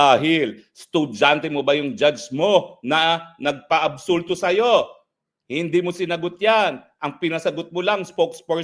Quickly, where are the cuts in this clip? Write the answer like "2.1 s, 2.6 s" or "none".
none